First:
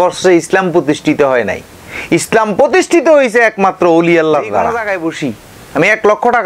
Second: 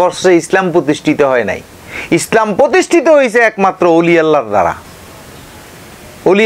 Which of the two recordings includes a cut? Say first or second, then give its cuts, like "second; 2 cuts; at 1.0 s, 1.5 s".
first; 1 cut; at 4.9 s